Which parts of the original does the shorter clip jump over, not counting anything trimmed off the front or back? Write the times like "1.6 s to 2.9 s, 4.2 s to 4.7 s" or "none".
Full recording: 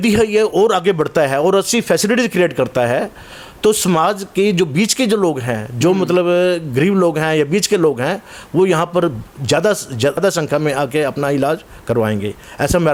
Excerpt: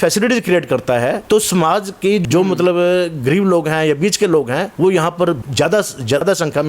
3.1 s to 3.5 s, 4.6 s to 5.7 s, 8.2 s to 8.4 s, 9.5 s to 9.7 s